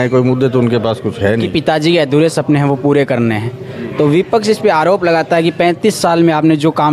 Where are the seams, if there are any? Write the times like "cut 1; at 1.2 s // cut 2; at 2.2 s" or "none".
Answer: cut 1; at 1.5 s